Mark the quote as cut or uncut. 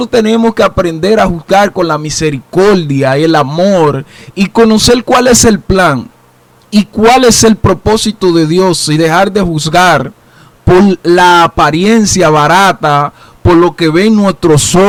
uncut